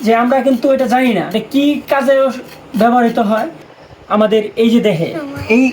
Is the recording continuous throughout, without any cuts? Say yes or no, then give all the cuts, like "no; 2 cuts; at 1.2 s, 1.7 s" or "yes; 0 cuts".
no; 2 cuts; at 1.3 s, 3.6 s